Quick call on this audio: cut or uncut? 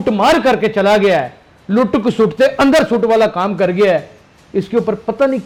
uncut